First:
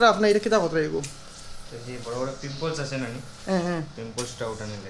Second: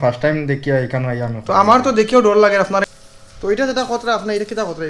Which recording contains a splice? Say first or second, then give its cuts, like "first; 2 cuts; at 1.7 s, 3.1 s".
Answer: second; 1 cut; at 2.9 s